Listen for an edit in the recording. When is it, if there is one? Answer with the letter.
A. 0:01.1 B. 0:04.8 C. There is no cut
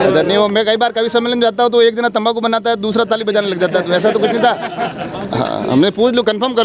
C